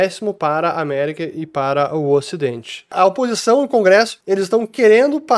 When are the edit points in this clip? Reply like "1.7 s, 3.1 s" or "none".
2.9 s, 4.2 s